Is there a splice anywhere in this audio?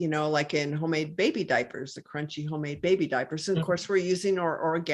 no; 0 cuts

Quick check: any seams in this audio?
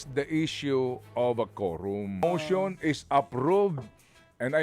yes; 1 cut; at 2.2 s

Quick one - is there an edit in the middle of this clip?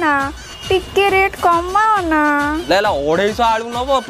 yes; 1 cut; at 2.7 s

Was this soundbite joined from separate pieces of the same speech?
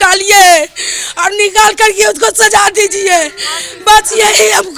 no; 0 cuts

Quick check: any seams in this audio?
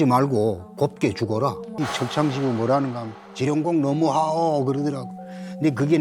yes; 1 cut; at 1.7 s

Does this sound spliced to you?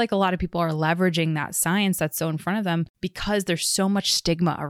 yes; 1 cut; at 3.0 s

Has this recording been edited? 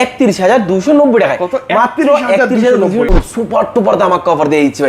yes; 1 cut; at 3.1 s

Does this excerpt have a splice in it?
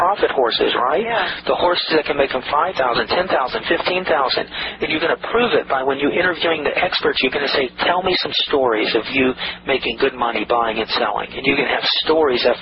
no; 0 cuts

